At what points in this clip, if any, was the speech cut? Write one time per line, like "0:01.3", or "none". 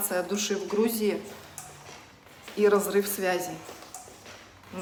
none